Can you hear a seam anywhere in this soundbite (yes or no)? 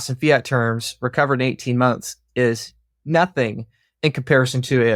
no